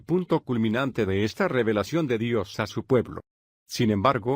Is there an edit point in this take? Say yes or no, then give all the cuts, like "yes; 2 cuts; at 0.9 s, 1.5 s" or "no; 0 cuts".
no; 0 cuts